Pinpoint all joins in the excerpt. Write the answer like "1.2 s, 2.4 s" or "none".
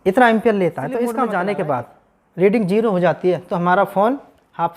1.2 s